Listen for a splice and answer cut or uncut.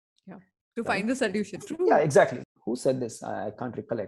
cut